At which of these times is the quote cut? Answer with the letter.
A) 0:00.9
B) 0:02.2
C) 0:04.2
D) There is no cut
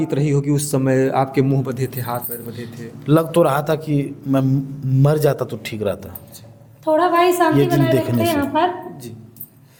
D